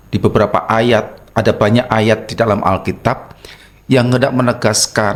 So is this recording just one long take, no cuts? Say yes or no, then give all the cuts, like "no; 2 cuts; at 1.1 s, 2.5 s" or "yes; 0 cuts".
yes; 0 cuts